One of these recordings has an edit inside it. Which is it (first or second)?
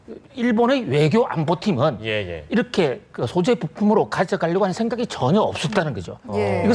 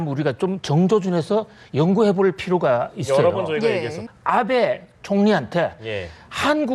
second